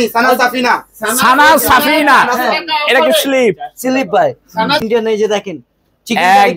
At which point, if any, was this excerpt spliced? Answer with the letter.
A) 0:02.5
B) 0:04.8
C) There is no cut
B